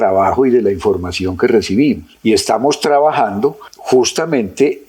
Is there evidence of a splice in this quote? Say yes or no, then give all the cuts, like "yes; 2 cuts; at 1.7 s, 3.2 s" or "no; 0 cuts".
no; 0 cuts